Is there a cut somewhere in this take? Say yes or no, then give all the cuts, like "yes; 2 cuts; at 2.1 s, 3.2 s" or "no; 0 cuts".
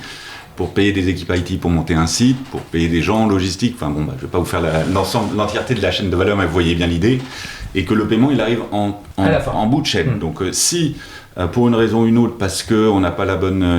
yes; 1 cut; at 9.0 s